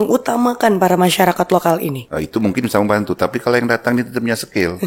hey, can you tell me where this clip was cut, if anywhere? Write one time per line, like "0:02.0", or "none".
0:02.0